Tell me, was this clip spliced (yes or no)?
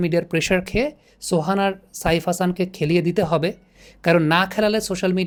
no